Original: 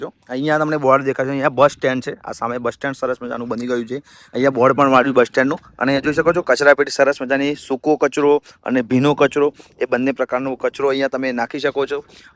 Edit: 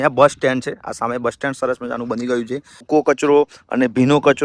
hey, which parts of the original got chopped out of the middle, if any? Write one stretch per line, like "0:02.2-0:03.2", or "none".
0:04.2-0:07.7

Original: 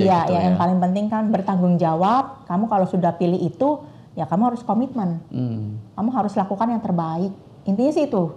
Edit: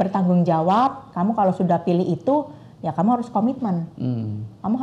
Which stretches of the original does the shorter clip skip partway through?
none

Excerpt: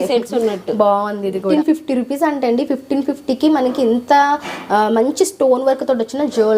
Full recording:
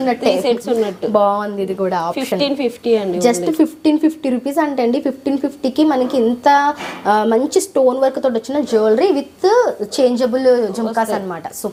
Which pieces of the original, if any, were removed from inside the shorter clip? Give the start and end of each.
0:01.8-0:03.8

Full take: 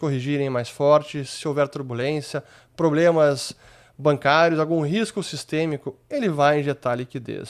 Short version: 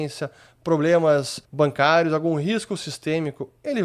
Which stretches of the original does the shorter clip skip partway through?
0:03.5-0:03.8

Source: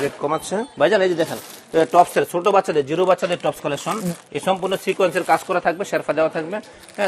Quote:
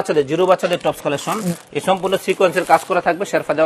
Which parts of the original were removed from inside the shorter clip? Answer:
none

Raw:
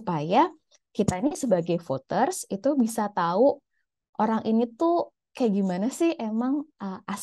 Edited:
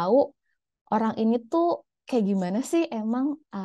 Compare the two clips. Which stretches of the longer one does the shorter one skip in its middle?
none

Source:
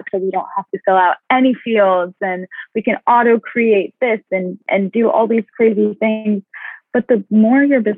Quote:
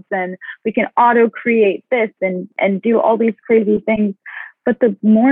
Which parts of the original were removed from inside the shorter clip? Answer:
0:06.0-0:06.2

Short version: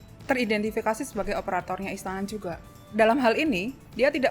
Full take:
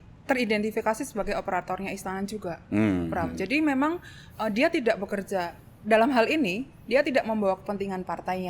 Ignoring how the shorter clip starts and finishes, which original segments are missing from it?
0:02.6-0:05.5

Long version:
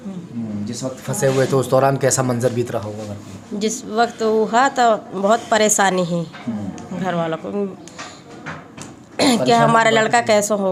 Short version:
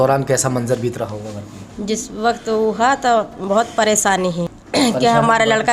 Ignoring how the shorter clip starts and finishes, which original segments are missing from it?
0:06.3-0:09.0

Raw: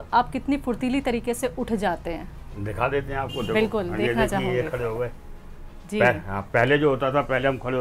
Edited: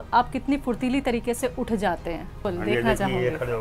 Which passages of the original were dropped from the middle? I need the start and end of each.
0:02.5-0:03.8

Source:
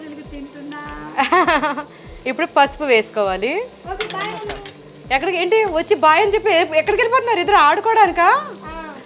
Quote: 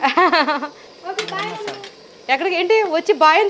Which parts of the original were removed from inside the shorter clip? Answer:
0:02.1-0:03.7

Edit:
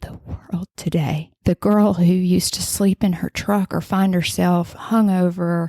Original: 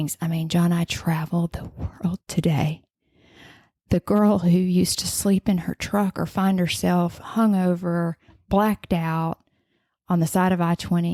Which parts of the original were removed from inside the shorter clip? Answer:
0:02.8-0:03.8

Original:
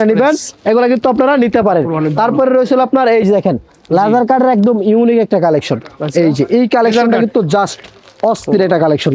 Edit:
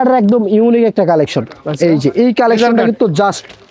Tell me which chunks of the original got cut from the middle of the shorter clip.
none

